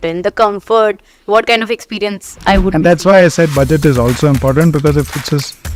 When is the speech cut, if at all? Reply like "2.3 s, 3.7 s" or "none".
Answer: none